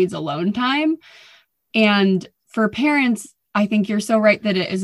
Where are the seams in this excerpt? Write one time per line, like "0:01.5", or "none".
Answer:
0:02.4